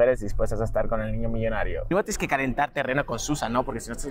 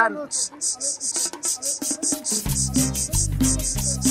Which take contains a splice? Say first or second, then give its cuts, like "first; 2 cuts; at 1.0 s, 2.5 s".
first; 1 cut; at 1.8 s